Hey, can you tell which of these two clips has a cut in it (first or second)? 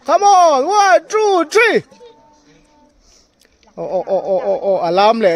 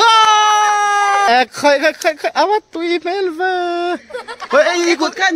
second